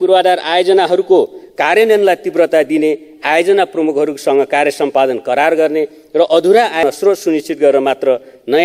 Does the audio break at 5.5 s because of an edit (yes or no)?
no